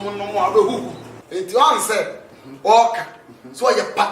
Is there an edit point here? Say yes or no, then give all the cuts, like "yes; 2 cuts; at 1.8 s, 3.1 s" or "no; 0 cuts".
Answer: yes; 1 cut; at 1.1 s